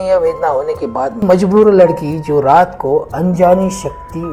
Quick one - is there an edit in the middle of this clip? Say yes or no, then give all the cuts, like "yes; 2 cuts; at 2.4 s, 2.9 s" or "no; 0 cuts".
yes; 1 cut; at 1.2 s